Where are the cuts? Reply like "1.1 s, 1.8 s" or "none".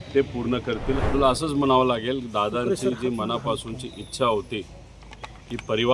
1.0 s